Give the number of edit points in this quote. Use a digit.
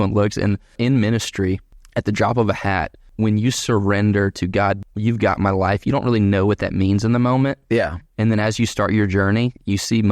4